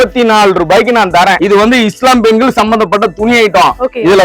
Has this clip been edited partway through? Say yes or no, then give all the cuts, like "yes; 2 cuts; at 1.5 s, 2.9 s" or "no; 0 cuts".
yes; 1 cut; at 1.4 s